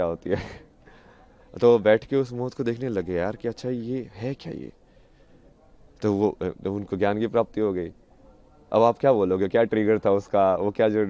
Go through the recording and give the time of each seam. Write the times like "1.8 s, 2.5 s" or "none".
none